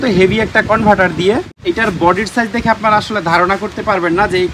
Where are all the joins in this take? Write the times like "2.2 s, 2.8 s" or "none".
1.5 s